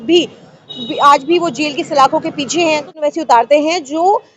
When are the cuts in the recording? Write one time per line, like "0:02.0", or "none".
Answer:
0:02.9